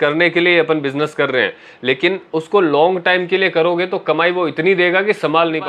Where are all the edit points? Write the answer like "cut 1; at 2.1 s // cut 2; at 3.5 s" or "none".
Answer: none

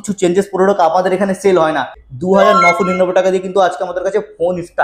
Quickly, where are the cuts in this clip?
cut 1; at 2.0 s

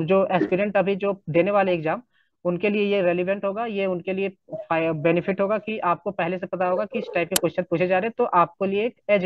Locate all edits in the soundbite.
none

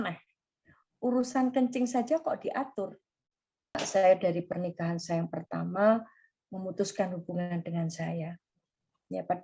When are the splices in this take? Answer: cut 1; at 3.8 s

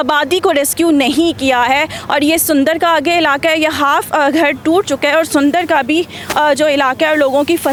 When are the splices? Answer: none

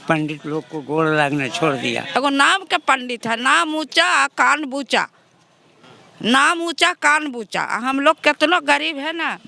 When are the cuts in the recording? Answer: cut 1; at 2.1 s

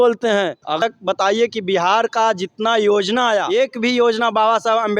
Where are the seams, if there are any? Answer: cut 1; at 0.8 s // cut 2; at 3.5 s

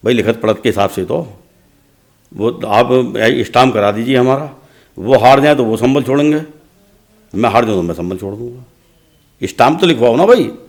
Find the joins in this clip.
none

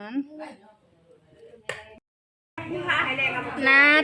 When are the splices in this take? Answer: cut 1; at 1.9 s

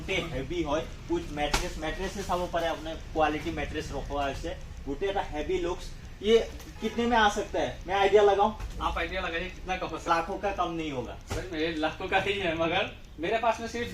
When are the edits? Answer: cut 1; at 10.1 s

